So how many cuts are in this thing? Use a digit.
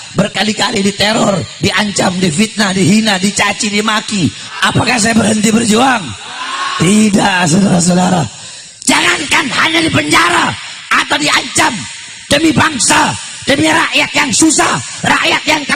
2